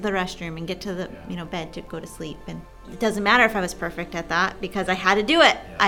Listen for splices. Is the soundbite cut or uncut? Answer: cut